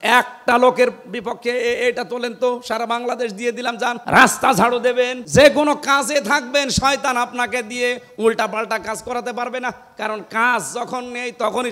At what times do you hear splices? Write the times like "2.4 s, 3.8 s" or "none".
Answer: 4.0 s, 5.2 s

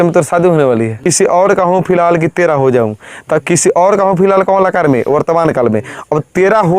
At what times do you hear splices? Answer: 1.0 s

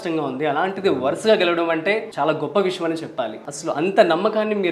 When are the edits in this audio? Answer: 2.1 s, 3.5 s

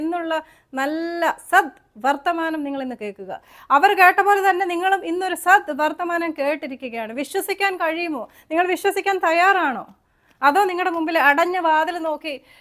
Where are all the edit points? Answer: none

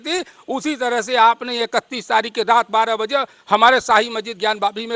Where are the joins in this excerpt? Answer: none

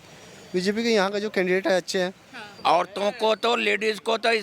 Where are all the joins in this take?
2.5 s

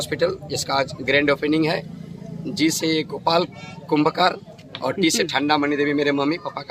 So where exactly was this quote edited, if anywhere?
none

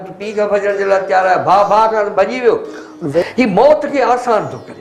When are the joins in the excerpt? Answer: 3.2 s

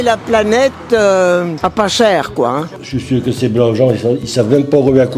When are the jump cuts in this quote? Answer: 1.5 s, 2.8 s

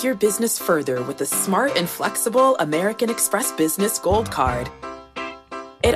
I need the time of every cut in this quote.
none

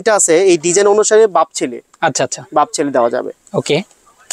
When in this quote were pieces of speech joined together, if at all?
none

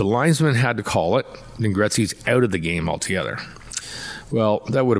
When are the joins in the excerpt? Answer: none

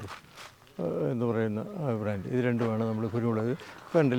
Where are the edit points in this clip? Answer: none

